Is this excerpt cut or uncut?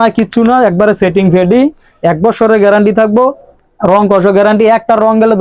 uncut